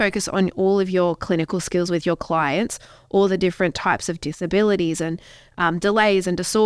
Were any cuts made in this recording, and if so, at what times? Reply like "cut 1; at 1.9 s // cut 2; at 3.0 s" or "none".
none